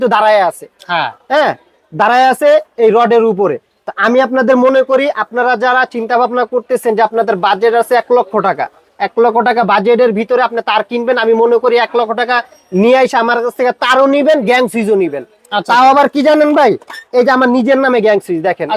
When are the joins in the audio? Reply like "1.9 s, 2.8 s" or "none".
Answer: none